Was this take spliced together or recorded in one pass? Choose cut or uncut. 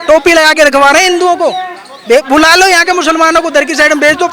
uncut